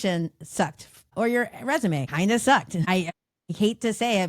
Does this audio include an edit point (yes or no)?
yes